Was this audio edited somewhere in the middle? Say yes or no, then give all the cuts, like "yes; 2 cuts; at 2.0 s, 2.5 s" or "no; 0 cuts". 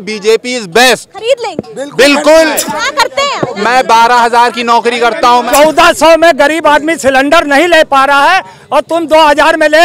yes; 2 cuts; at 3.1 s, 5.5 s